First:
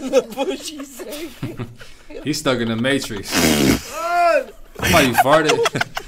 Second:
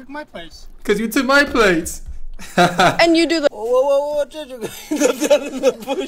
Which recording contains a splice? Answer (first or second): second